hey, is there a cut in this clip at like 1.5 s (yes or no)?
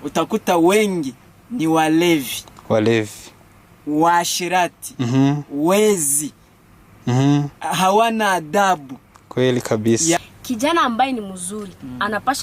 no